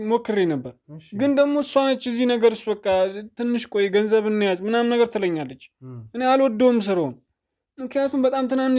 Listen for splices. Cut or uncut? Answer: uncut